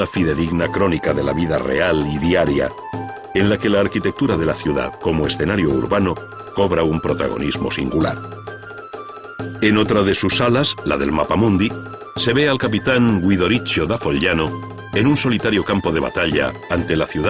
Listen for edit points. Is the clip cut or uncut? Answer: cut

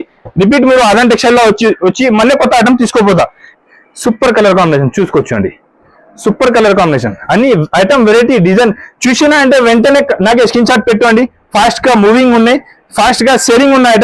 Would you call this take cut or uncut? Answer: cut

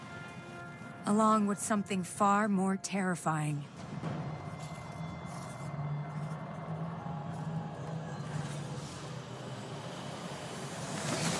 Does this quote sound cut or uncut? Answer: cut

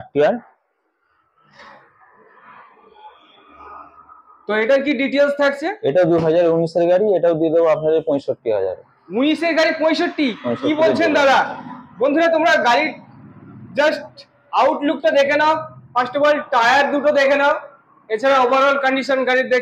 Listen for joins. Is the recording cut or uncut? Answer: uncut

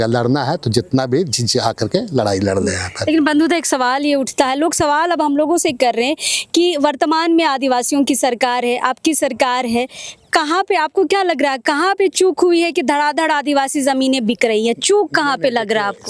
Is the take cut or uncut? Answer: uncut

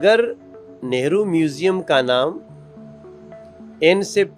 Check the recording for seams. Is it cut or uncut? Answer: uncut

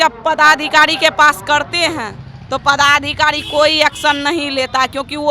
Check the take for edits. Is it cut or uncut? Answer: uncut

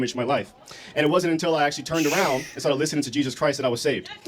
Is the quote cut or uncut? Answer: uncut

